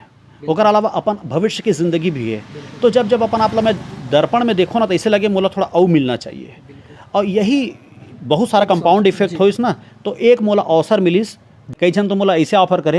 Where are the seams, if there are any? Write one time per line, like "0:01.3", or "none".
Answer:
0:11.7

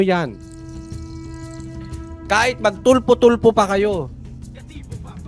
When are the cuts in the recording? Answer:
0:04.1

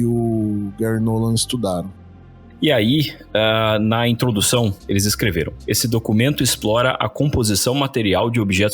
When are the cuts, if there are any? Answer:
0:02.0
0:04.8

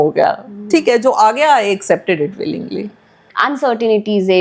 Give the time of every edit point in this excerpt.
0:03.3

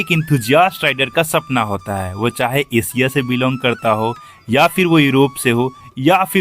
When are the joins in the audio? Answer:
none

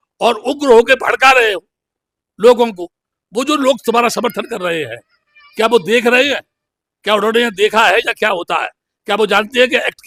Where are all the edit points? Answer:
none

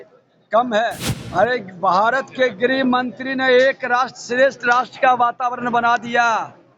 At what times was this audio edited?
0:01.1

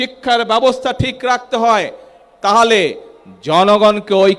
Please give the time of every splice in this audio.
none

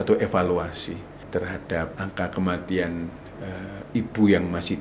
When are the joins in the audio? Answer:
0:01.1
0:01.9

